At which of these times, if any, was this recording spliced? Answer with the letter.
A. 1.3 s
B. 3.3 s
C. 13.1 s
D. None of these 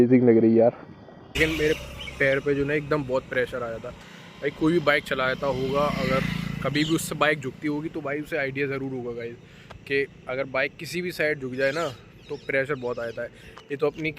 A